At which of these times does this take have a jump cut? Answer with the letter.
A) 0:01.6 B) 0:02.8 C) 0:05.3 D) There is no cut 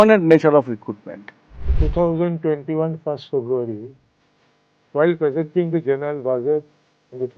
A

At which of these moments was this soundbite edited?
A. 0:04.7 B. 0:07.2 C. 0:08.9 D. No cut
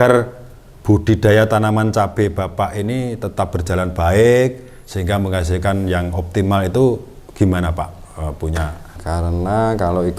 C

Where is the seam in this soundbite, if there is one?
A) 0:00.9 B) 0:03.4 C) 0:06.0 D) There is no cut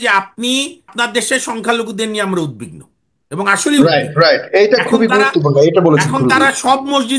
A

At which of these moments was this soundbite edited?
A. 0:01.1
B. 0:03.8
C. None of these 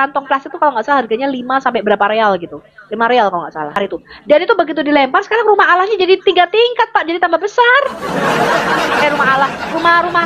B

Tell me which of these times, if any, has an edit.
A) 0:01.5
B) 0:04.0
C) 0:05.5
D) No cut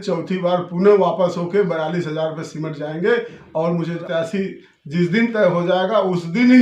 B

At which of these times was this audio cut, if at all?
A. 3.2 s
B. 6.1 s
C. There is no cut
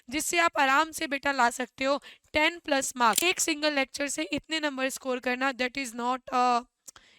A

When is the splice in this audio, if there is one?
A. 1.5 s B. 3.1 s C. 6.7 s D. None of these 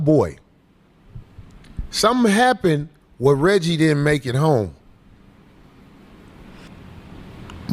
C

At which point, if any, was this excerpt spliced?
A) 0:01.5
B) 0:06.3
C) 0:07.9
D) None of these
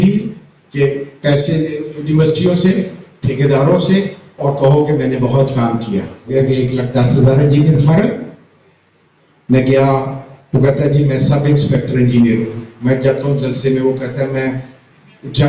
B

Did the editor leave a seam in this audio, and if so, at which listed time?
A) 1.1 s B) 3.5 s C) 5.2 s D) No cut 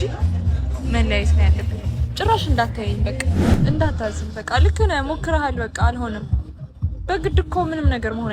B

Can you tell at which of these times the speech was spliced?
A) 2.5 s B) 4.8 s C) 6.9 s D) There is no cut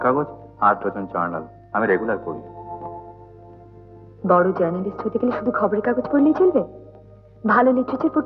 D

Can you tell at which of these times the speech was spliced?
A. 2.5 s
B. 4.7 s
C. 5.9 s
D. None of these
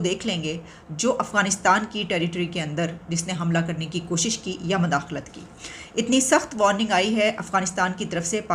D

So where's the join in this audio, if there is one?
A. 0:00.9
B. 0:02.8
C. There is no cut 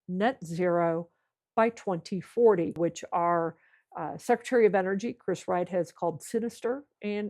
B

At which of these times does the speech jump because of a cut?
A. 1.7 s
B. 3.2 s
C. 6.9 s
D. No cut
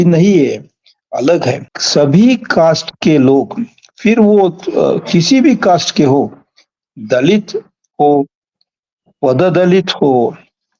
A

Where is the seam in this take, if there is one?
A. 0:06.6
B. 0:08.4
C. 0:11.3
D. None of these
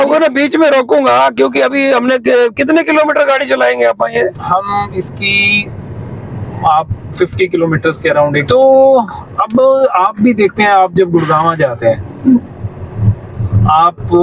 B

